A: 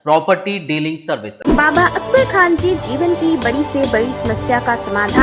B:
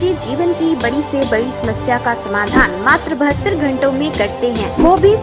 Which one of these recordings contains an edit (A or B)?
A